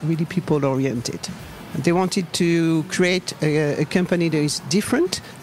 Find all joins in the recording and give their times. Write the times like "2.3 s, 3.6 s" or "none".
1.6 s